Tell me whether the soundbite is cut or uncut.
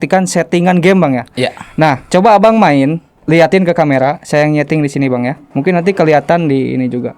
cut